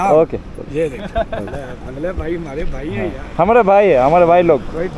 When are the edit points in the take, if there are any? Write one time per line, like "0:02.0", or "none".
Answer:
none